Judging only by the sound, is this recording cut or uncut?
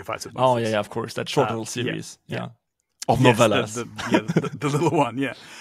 uncut